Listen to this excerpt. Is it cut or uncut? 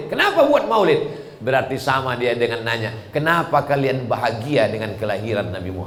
uncut